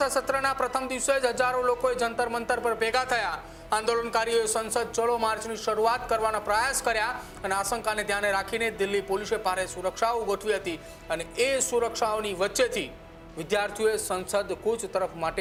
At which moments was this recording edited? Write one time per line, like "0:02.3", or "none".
none